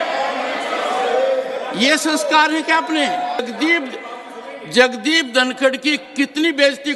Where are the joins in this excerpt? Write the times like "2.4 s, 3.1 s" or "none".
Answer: 3.4 s